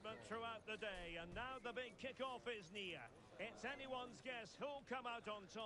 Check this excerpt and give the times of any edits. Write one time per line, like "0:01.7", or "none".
none